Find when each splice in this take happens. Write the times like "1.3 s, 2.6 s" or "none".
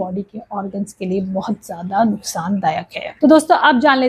3.0 s